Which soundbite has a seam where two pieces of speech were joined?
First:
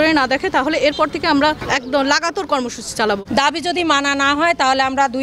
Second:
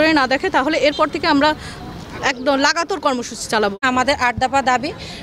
first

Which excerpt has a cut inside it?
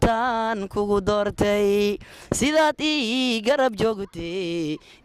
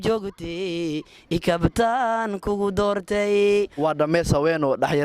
second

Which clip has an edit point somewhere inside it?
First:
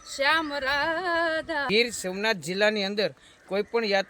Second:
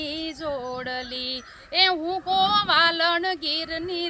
first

